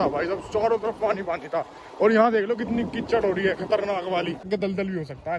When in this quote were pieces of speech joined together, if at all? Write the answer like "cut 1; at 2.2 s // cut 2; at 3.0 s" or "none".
cut 1; at 4.5 s